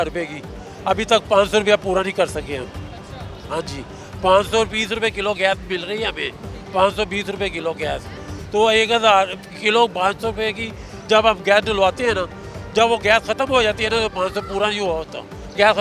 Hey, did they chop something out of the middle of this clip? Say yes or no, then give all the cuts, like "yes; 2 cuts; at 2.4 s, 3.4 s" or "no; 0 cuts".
no; 0 cuts